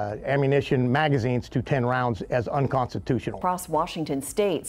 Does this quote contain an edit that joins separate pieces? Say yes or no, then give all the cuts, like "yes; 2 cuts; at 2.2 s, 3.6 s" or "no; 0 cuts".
yes; 1 cut; at 3.4 s